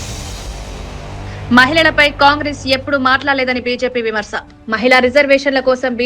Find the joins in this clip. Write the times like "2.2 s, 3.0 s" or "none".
1.4 s